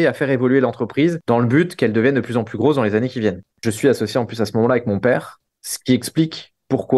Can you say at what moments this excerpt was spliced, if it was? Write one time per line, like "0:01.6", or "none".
0:03.6